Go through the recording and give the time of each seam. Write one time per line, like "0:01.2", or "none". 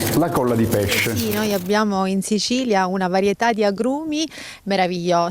0:01.2